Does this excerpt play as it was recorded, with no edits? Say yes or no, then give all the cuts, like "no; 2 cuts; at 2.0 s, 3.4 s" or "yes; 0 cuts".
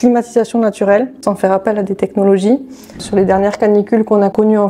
no; 2 cuts; at 1.2 s, 2.7 s